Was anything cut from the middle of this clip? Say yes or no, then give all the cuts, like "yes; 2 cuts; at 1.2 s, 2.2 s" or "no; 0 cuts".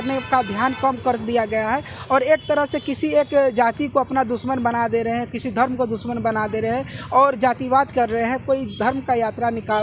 no; 0 cuts